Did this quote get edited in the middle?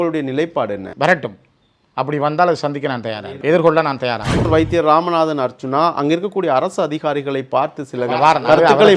yes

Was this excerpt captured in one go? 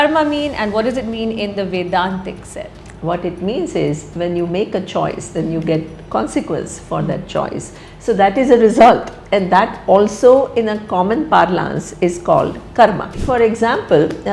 no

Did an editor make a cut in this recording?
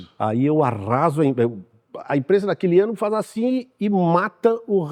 no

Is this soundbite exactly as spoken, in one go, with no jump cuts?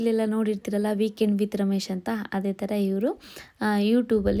yes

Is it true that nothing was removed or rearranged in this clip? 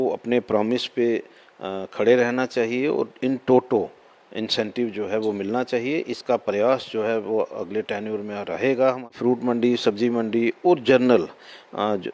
no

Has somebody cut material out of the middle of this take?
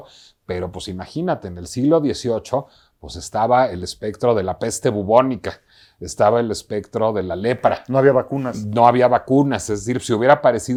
no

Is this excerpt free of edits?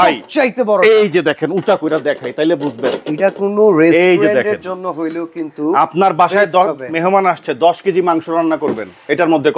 yes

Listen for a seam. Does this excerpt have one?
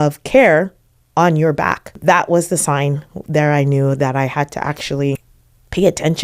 yes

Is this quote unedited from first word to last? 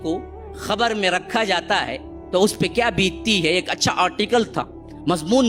yes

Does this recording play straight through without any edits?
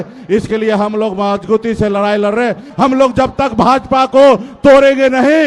no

